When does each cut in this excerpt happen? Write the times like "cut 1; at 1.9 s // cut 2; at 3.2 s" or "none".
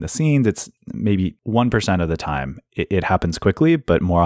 none